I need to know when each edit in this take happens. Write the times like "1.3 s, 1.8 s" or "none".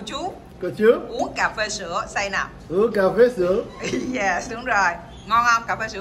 1.2 s